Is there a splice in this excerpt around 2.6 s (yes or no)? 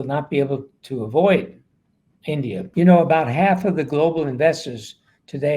yes